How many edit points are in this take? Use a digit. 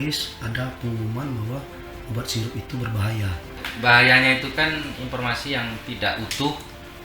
1